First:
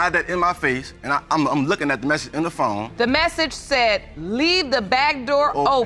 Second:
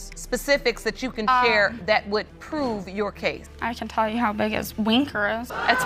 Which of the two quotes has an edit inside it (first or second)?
first